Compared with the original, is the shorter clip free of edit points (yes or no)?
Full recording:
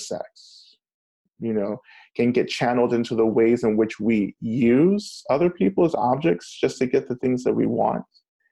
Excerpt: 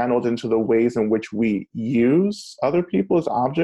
yes